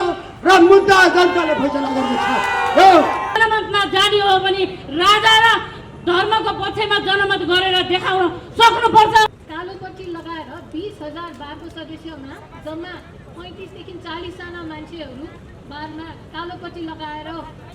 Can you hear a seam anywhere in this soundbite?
yes; 2 cuts; at 3.3 s, 9.4 s

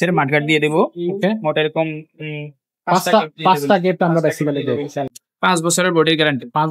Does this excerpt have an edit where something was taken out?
yes; 1 cut; at 5.1 s

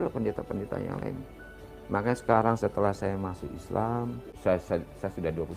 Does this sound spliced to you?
yes; 1 cut; at 4.3 s

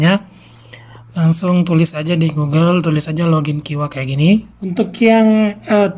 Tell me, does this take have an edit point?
yes; 1 cut; at 4.6 s

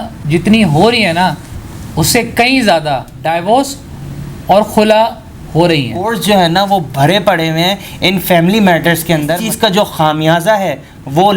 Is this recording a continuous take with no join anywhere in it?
no; 2 cuts; at 6.5 s, 9.4 s

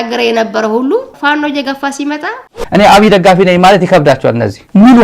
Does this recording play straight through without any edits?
no; 1 cut; at 2.5 s

